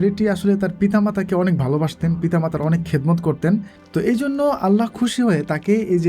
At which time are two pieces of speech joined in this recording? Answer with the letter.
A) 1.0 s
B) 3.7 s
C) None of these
B